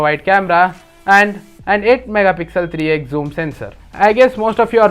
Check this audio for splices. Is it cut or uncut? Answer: cut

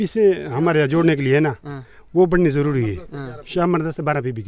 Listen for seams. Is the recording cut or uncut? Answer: uncut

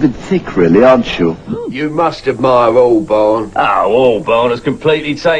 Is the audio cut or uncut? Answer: uncut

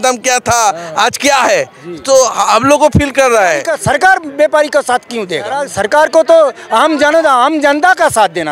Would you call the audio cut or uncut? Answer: cut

